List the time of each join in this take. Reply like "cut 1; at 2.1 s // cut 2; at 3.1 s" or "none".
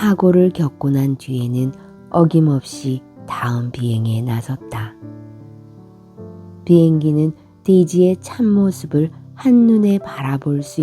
cut 1; at 5.1 s // cut 2; at 6.6 s